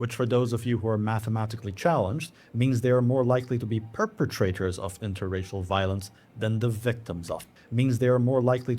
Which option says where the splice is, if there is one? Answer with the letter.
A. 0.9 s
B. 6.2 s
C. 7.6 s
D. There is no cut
C